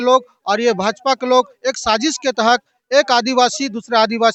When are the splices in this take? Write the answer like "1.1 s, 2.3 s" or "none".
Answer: none